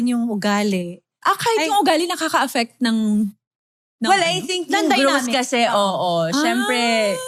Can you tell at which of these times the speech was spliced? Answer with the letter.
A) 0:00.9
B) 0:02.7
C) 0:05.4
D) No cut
D